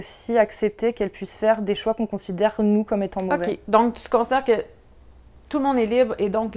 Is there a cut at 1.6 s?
no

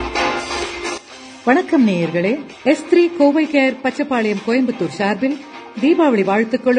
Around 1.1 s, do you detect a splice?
yes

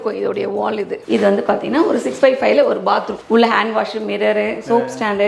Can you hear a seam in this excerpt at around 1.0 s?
yes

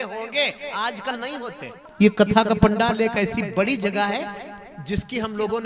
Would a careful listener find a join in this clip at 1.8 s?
yes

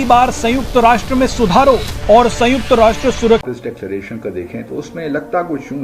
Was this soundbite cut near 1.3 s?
no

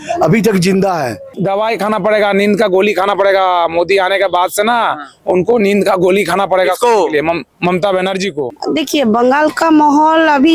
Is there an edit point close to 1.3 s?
yes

